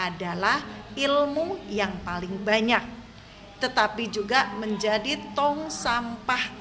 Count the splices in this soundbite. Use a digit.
0